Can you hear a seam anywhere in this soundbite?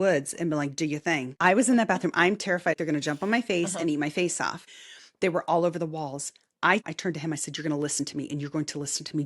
yes; 4 cuts; at 1.3 s, 2.8 s, 4.6 s, 6.9 s

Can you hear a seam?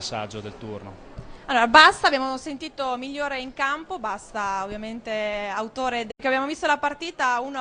no; 0 cuts

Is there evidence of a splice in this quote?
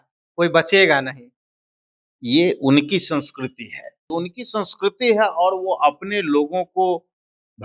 yes; 1 cut; at 3.9 s

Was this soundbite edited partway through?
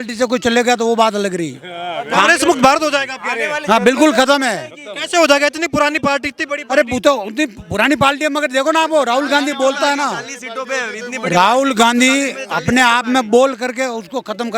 no; 0 cuts

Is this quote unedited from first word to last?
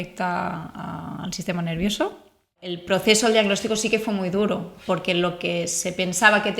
no; 1 cut; at 2.7 s

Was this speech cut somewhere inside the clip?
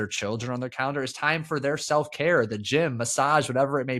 no; 0 cuts

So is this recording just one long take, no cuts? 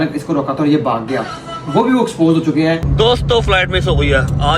no; 1 cut; at 2.9 s

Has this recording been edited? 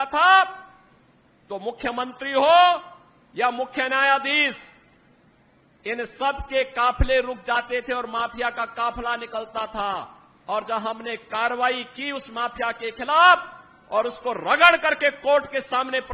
no; 0 cuts

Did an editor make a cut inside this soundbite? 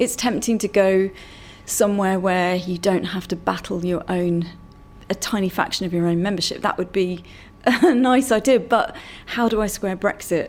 no; 0 cuts

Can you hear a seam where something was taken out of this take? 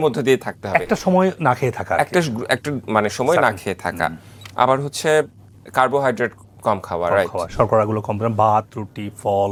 no; 0 cuts

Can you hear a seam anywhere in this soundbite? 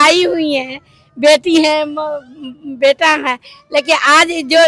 no; 0 cuts

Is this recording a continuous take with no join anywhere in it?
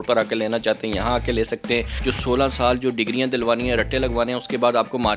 no; 1 cut; at 1.9 s

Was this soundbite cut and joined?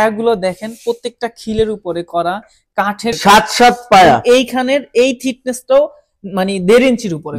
yes; 1 cut; at 3.2 s

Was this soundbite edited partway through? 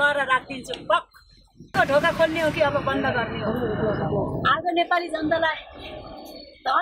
yes; 1 cut; at 1.7 s

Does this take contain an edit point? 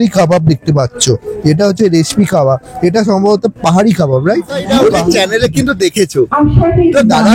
yes; 1 cut; at 4.6 s

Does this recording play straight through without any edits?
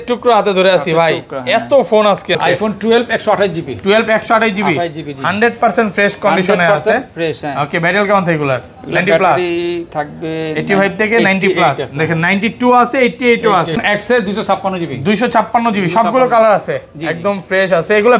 no; 2 cuts; at 2.4 s, 13.7 s

